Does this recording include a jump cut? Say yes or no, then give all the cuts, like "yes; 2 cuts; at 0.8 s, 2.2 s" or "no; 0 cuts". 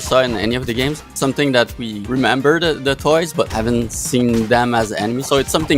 yes; 3 cuts; at 1.1 s, 1.9 s, 3.5 s